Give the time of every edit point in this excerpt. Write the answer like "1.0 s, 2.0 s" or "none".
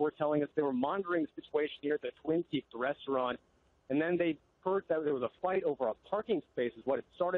3.0 s